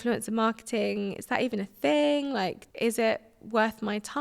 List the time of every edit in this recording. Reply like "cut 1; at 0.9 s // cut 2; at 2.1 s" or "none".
cut 1; at 2.6 s